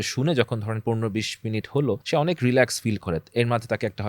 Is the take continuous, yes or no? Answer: no